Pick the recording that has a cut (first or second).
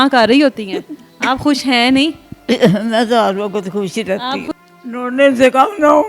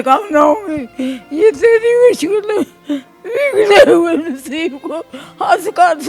first